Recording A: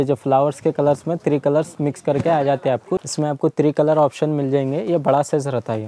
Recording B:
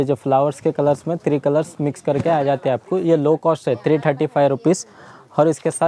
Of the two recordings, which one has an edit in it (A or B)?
A